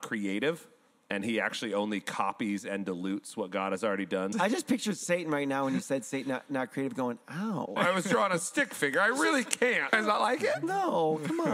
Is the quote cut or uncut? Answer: cut